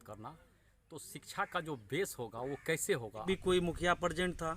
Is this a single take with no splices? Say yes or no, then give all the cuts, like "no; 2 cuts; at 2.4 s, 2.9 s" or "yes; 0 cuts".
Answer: no; 1 cut; at 3.2 s